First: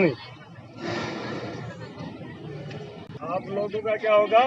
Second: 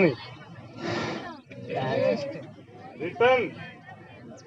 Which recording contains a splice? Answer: second; 1 cut; at 1.2 s

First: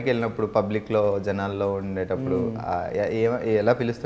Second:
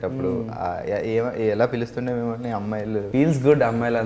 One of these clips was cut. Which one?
second; 1 cut; at 3.1 s

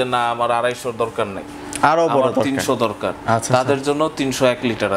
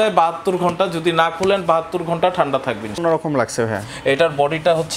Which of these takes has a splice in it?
second; 1 cut; at 3.0 s

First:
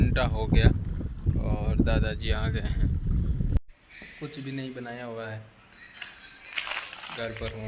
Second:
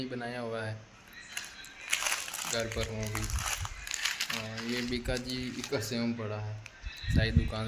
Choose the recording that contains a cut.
first; 1 cut; at 3.6 s

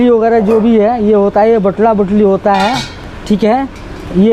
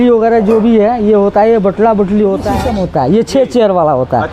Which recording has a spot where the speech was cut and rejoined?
second; 1 cut; at 2.7 s

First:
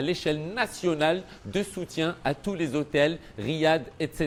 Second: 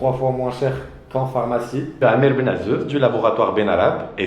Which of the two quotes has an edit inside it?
second; 1 cut; at 2.0 s

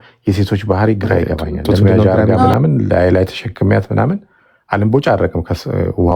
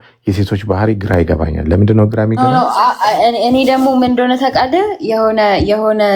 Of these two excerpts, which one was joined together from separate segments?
first; 1 cut; at 2.0 s

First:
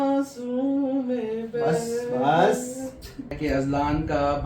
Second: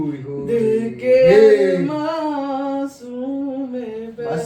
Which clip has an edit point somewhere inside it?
first; 1 cut; at 3.4 s

